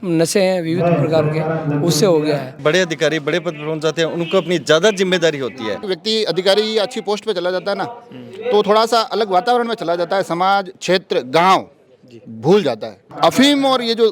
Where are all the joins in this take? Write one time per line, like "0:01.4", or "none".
0:02.6
0:05.9
0:13.1